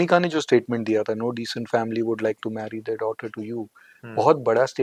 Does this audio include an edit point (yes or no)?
no